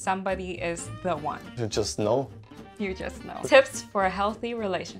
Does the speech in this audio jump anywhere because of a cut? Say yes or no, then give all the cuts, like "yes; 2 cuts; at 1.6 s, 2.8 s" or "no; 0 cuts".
yes; 2 cuts; at 1.5 s, 3.3 s